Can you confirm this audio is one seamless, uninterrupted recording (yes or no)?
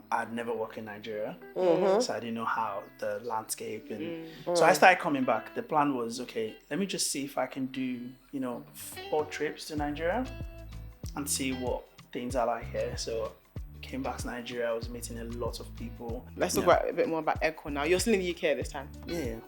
no